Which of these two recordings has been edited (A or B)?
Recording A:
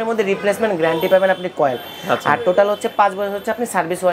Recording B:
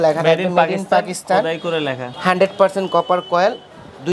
B